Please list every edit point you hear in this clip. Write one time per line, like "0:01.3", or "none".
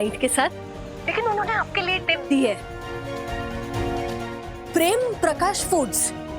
none